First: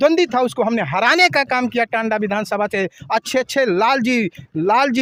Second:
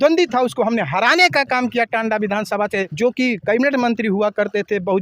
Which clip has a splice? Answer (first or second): second